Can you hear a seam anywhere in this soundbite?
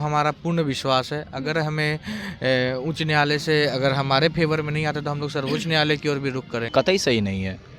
yes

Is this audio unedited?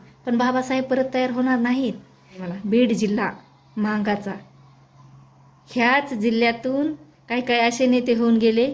no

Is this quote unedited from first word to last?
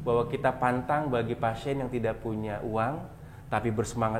yes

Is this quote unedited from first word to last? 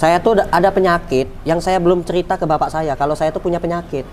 yes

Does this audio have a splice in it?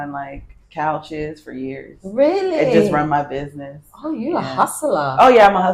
no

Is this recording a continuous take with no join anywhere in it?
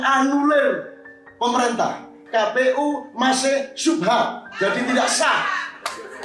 no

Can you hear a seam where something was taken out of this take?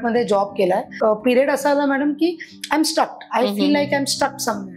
yes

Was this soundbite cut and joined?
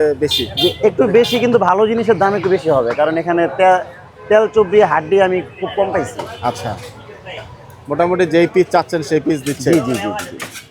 no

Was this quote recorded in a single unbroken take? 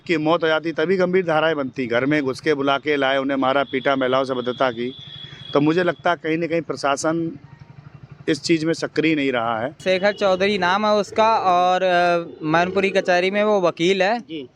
no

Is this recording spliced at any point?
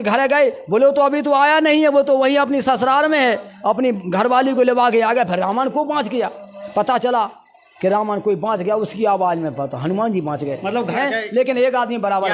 yes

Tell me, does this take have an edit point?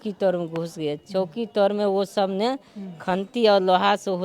no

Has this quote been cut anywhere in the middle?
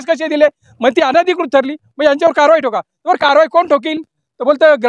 no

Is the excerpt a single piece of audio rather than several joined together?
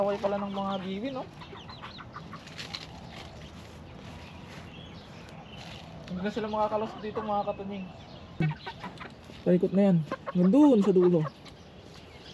no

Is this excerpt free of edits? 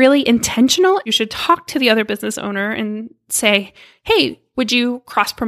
no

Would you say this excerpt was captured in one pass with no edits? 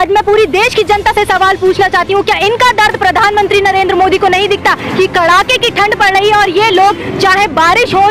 yes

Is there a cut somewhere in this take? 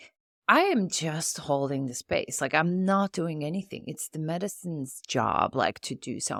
no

